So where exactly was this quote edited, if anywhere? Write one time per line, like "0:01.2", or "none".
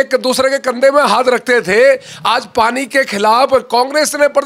none